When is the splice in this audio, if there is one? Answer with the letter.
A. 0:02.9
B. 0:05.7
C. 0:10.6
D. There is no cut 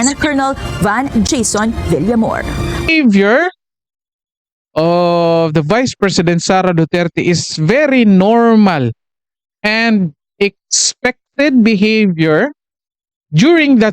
A